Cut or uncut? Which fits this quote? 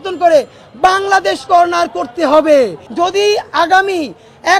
cut